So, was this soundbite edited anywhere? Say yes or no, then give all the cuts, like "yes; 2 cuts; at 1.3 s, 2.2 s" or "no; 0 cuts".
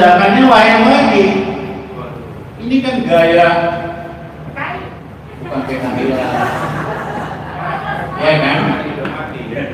no; 0 cuts